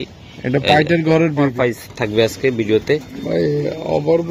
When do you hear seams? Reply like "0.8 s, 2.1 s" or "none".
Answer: 1.6 s